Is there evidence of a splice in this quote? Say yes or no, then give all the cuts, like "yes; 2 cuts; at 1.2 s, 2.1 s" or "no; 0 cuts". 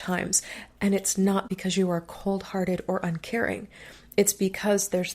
yes; 1 cut; at 1.5 s